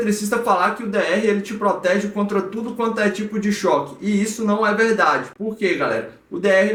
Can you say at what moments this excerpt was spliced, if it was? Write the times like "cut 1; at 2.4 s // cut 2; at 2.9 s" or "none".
none